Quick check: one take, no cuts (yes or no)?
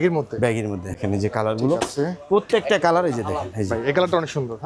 no